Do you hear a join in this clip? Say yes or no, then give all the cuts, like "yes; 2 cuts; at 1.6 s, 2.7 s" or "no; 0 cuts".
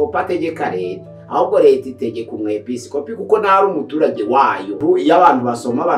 yes; 1 cut; at 4.8 s